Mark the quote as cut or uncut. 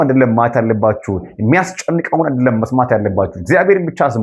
uncut